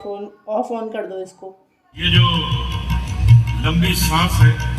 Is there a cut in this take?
yes; 1 cut; at 2.0 s

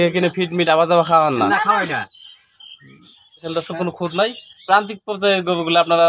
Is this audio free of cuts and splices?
no; 1 cut; at 3.5 s

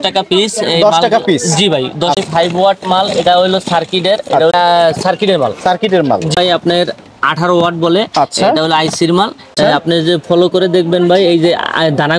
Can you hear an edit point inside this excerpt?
yes; 4 cuts; at 2.2 s, 4.5 s, 6.4 s, 9.5 s

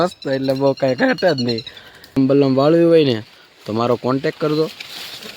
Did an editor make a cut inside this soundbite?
yes; 1 cut; at 2.2 s

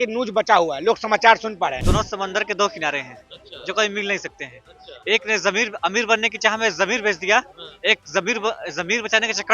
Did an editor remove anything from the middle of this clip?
yes; 1 cut; at 1.8 s

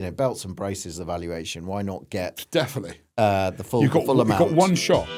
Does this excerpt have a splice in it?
no; 0 cuts

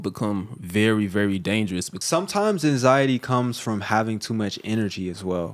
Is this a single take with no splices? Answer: no; 1 cut; at 1.9 s

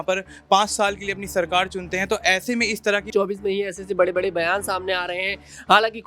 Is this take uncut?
no; 1 cut; at 3.1 s

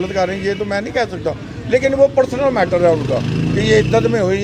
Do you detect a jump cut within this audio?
no; 0 cuts

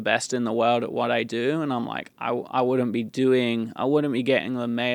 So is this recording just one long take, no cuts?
yes; 0 cuts

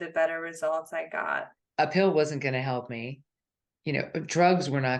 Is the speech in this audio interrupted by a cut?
yes; 1 cut; at 1.6 s

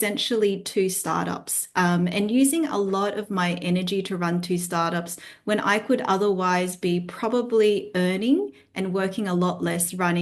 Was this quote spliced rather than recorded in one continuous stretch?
no; 0 cuts

